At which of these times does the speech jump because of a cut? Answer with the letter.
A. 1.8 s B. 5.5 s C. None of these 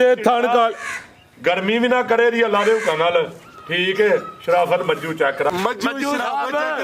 B